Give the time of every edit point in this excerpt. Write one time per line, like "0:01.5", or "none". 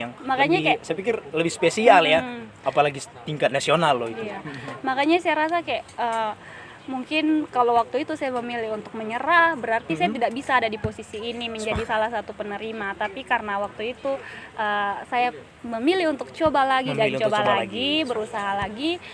none